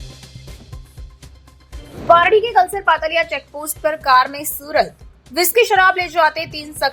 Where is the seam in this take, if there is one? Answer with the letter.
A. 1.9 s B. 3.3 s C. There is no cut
A